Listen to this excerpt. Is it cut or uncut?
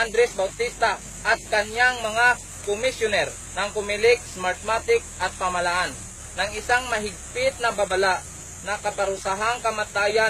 cut